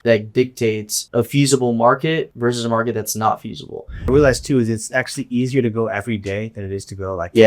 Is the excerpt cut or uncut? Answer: cut